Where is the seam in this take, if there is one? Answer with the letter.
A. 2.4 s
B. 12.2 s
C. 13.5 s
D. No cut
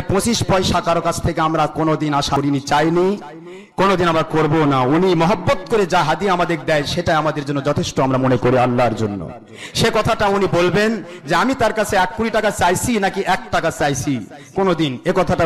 A